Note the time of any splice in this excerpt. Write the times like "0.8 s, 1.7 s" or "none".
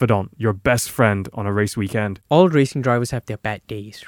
2.2 s